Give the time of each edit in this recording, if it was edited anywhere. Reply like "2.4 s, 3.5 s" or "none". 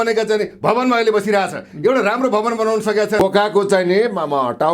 3.2 s